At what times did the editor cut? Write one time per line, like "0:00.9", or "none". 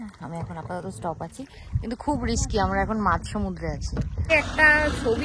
0:04.3